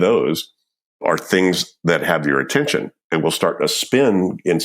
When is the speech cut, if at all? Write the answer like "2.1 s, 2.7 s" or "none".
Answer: 1.0 s

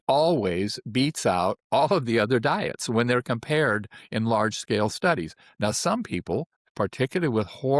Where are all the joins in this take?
6.6 s

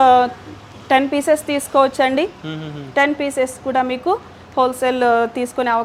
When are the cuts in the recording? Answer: none

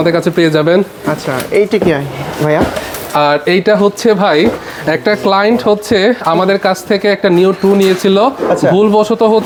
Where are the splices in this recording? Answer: none

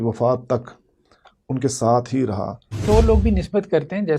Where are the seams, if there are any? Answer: 2.8 s

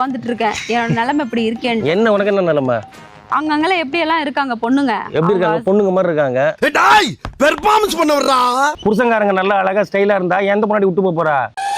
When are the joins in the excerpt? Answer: 8.8 s

